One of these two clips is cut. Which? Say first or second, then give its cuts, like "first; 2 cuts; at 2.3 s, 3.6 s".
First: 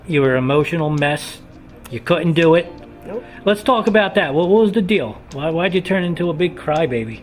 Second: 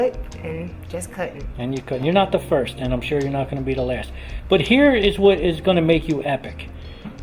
second; 1 cut; at 4.9 s